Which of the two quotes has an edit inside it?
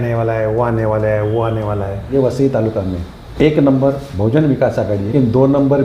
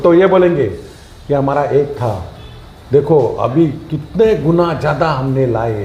first; 3 cuts; at 2.0 s, 3.2 s, 5.1 s

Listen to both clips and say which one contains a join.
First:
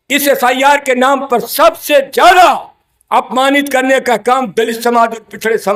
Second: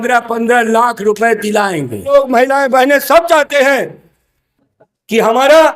second; 1 cut; at 2.1 s

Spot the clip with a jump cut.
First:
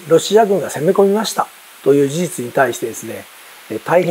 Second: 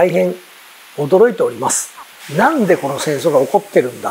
second; 1 cut; at 2.2 s

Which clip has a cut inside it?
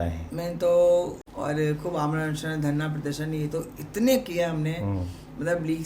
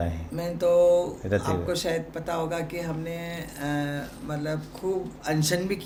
first; 1 cut; at 1.2 s

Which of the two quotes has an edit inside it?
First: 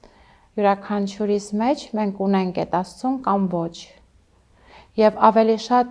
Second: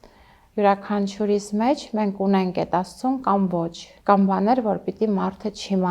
second; 1 cut; at 3.8 s

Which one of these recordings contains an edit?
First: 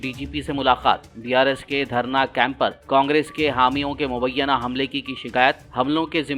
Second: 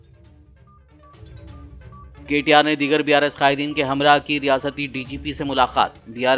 second; 1 cut; at 0.9 s

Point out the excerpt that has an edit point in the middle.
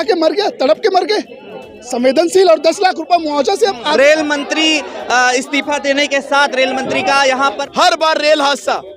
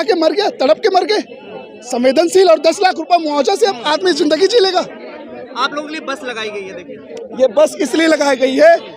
first; 2 cuts; at 3.9 s, 7.6 s

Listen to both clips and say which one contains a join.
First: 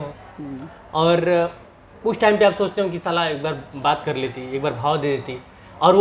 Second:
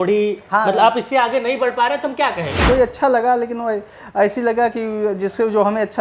second; 1 cut; at 2.5 s

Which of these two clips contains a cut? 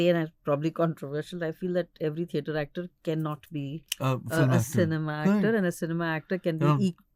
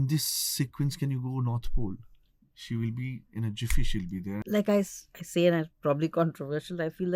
second; 1 cut; at 4.4 s

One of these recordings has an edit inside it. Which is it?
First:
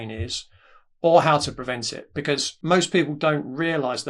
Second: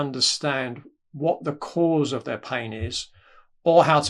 first; 1 cut; at 2.5 s

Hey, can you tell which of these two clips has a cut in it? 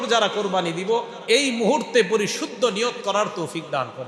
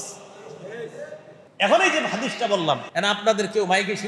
second; 2 cuts; at 1.4 s, 2.9 s

